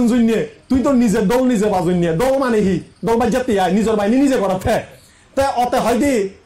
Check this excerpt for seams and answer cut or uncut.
uncut